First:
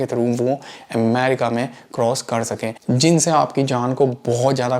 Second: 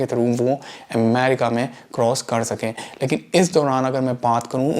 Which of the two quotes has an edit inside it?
first; 1 cut; at 2.8 s

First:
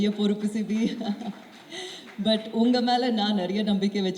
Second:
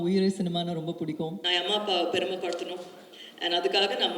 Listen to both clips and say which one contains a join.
second; 1 cut; at 1.4 s

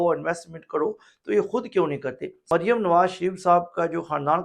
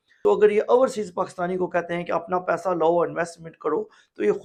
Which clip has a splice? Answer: first; 1 cut; at 2.5 s

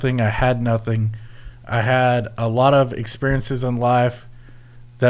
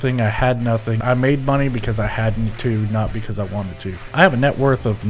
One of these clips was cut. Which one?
second; 2 cuts; at 1.0 s, 4.1 s

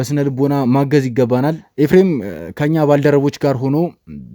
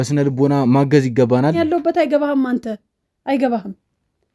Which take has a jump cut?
second; 1 cut; at 1.6 s

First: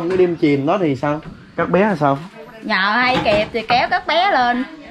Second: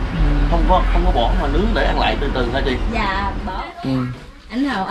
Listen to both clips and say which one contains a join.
second; 1 cut; at 3.6 s

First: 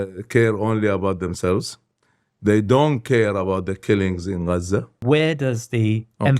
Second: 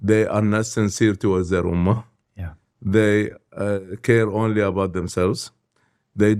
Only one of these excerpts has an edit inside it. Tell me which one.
first; 1 cut; at 4.9 s

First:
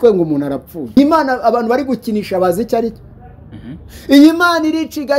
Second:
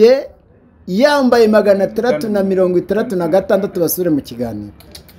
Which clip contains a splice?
first; 1 cut; at 1.0 s

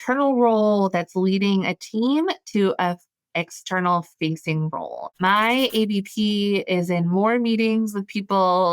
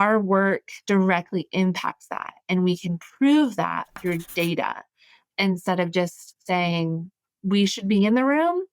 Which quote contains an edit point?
first; 1 cut; at 5.0 s

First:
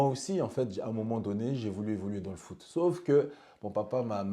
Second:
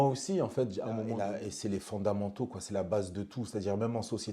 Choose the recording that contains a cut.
second; 1 cut; at 1.1 s

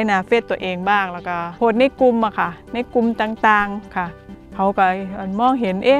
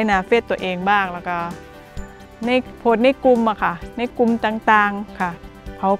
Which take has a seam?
first; 1 cut; at 1.5 s

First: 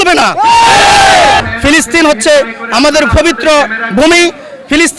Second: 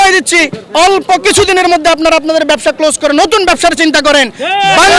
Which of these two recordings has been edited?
first; 1 cut; at 1.4 s

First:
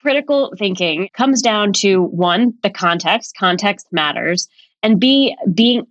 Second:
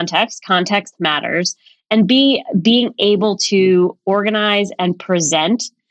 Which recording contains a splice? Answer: first; 1 cut; at 1.1 s

